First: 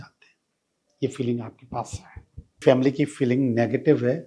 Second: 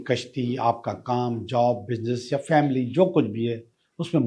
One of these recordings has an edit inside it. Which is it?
first; 1 cut; at 2.6 s

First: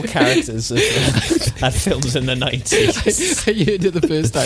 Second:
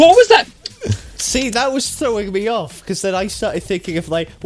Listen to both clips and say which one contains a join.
second; 1 cut; at 1.3 s

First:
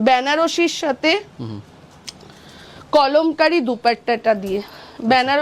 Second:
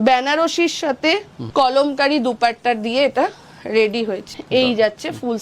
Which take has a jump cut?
second; 2 cuts; at 1.4 s, 4.3 s

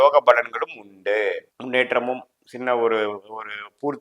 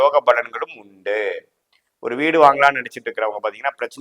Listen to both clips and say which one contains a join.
first; 1 cut; at 1.5 s

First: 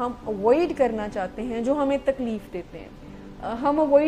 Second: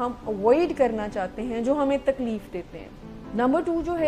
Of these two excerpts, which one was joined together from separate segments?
second; 1 cut; at 3.2 s

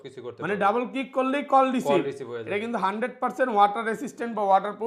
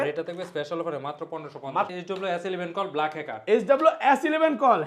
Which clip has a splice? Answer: second; 1 cut; at 1.9 s

